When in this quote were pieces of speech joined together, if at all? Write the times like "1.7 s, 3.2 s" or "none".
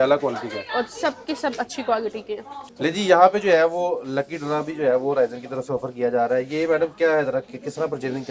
2.6 s